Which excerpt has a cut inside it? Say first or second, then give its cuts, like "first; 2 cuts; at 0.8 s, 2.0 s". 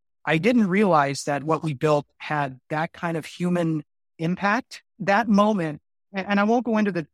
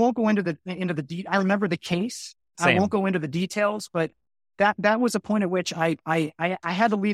first; 1 cut; at 5.0 s